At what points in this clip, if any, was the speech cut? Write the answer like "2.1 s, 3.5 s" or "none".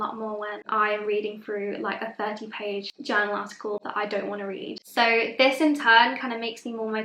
2.9 s, 4.8 s